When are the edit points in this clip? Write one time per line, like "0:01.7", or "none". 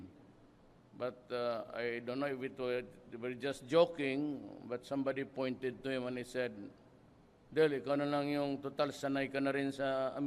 0:02.5